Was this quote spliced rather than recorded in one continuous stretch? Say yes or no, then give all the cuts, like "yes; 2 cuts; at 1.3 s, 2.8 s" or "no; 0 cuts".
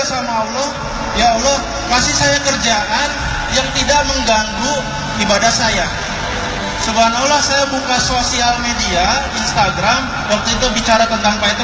no; 0 cuts